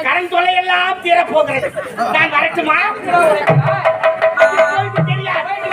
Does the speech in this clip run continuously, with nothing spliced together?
yes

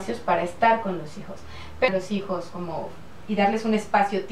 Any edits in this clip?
yes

